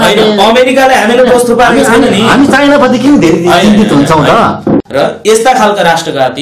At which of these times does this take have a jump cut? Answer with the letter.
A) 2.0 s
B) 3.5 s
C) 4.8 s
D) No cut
C